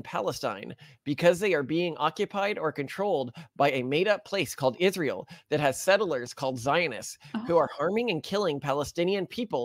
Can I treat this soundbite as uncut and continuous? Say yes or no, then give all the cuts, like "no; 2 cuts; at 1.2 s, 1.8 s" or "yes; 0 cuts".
yes; 0 cuts